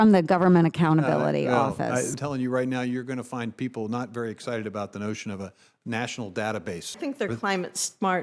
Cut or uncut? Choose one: cut